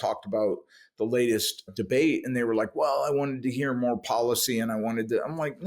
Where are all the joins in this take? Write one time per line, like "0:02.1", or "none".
0:01.7

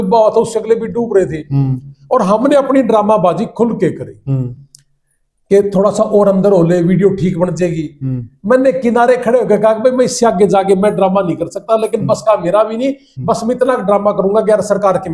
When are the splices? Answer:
none

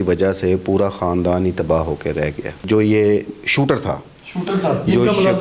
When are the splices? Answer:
0:02.6

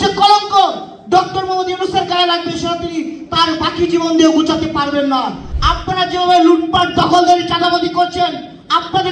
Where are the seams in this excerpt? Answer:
0:05.5

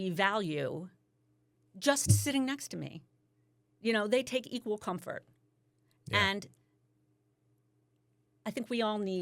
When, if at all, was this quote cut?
none

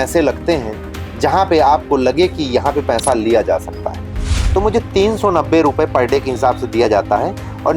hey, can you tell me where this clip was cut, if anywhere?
0:04.2

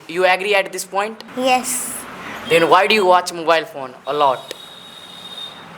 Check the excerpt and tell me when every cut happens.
0:01.2

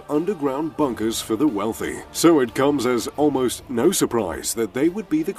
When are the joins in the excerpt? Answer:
none

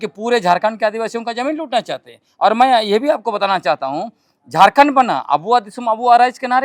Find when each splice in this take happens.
none

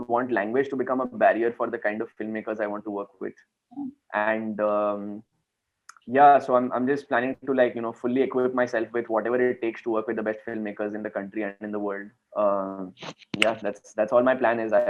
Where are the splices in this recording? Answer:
0:12.2

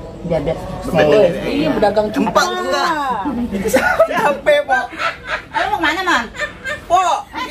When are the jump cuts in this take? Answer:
0:03.4

